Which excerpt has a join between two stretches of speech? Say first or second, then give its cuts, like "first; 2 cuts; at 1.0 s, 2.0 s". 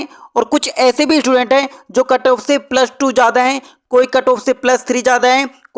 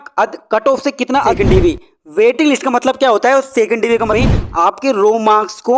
second; 2 cuts; at 1.3 s, 4.1 s